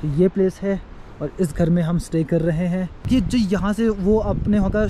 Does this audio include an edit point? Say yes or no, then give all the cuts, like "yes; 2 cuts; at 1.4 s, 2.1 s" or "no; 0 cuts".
yes; 1 cut; at 3.0 s